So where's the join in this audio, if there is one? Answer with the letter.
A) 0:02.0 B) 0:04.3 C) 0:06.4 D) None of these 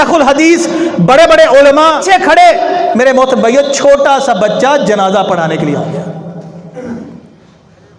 A